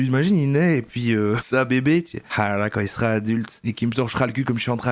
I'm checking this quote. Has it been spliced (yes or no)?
yes